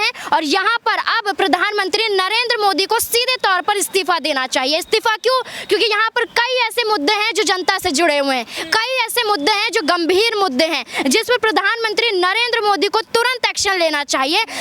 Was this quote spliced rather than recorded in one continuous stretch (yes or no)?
no